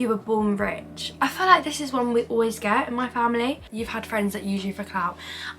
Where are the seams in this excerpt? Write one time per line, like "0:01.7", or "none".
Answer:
0:03.6